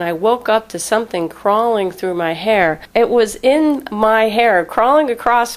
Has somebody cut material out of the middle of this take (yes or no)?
yes